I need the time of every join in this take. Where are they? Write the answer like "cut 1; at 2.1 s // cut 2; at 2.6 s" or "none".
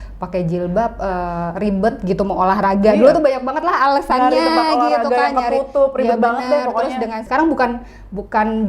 cut 1; at 7.2 s